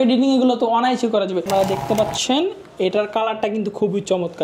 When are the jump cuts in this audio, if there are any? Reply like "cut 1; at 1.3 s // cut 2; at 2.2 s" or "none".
cut 1; at 1.5 s

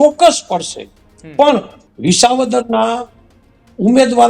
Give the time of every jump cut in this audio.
cut 1; at 1.8 s

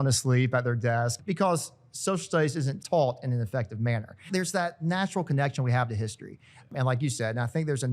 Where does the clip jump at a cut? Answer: cut 1; at 1.2 s // cut 2; at 2.8 s // cut 3; at 4.3 s // cut 4; at 6.7 s

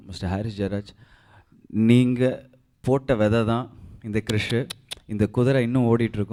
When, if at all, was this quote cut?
none

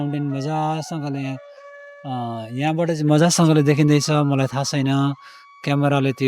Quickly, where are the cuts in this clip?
none

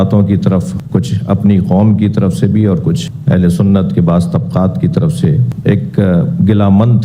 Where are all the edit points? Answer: none

